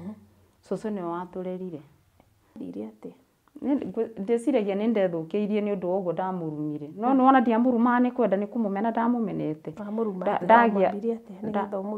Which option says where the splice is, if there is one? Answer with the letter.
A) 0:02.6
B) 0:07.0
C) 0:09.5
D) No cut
A